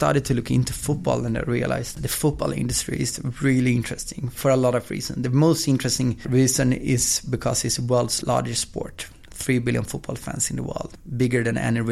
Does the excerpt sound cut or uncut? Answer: cut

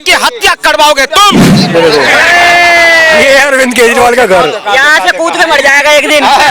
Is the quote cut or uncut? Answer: cut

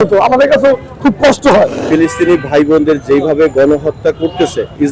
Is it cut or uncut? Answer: cut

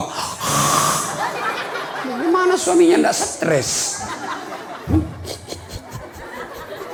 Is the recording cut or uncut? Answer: uncut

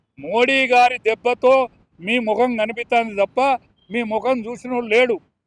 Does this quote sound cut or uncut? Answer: uncut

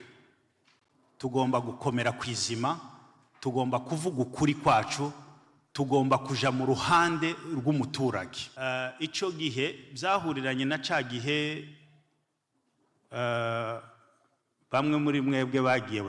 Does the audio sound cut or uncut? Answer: cut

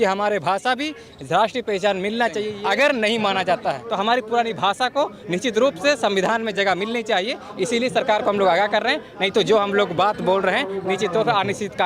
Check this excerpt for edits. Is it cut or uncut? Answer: cut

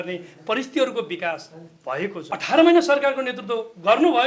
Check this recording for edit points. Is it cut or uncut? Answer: cut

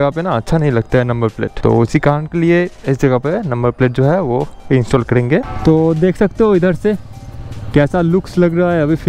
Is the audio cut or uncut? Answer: cut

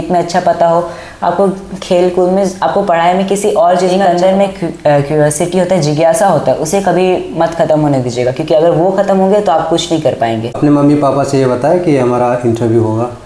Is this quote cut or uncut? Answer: cut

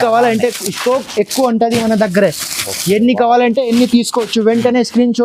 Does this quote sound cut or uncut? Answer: uncut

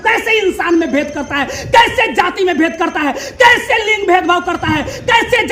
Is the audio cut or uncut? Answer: uncut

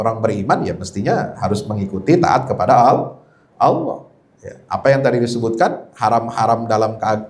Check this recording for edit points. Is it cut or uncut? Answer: uncut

